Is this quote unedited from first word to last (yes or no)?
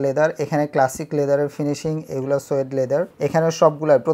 yes